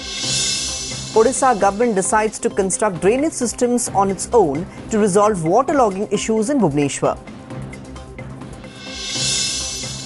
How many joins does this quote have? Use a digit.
1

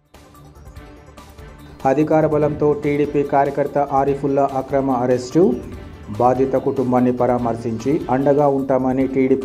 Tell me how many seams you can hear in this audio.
1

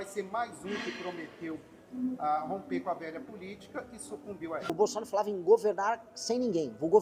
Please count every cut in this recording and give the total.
1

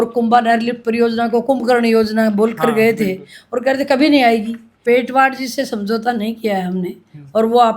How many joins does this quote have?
1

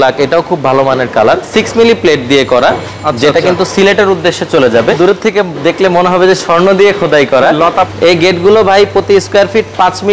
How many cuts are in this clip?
3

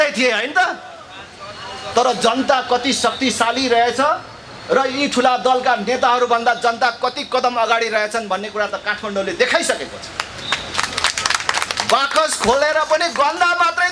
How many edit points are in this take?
0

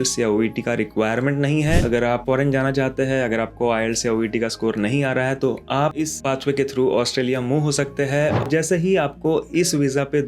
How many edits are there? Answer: 2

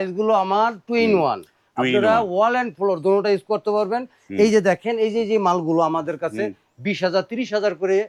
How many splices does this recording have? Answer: 0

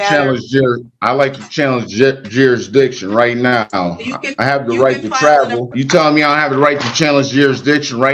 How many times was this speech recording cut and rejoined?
1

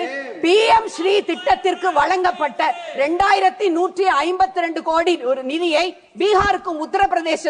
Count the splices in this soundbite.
0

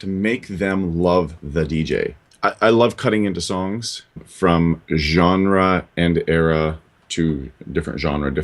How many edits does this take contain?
2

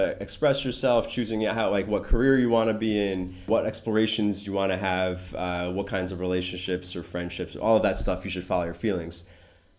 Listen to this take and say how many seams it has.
1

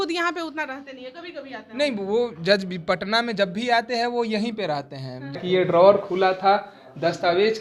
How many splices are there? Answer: 1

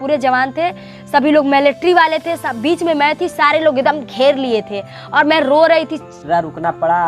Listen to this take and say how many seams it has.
1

